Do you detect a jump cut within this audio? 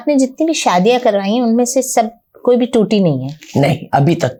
no; 0 cuts

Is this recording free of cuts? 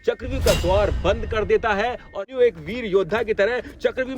no; 1 cut; at 2.3 s

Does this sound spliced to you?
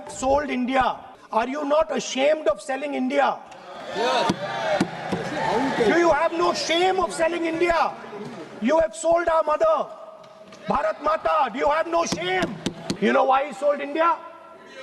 yes; 2 cuts; at 1.1 s, 12.9 s

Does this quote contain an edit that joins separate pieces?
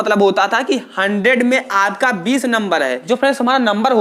yes; 1 cut; at 3.0 s

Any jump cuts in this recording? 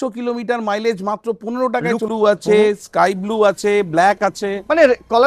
yes; 1 cut; at 2.0 s

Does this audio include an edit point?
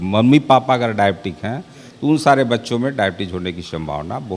no; 0 cuts

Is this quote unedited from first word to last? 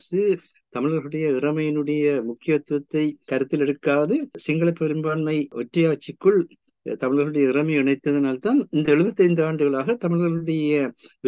no; 3 cuts; at 3.3 s, 4.3 s, 5.6 s

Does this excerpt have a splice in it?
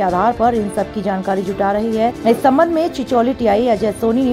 yes; 1 cut; at 2.2 s

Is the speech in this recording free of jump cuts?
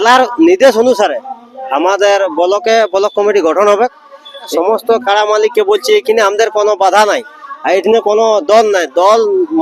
no; 1 cut; at 4.5 s

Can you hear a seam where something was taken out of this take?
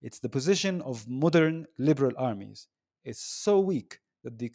no; 0 cuts

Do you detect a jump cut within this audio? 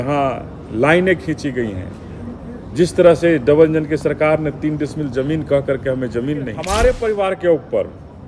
yes; 1 cut; at 6.6 s

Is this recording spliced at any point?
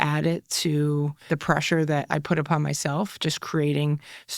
yes; 1 cut; at 1.2 s

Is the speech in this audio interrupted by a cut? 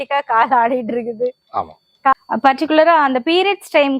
yes; 1 cut; at 2.2 s

